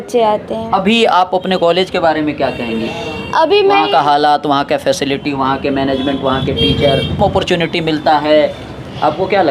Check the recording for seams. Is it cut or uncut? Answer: cut